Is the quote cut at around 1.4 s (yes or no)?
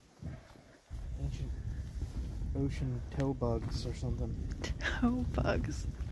no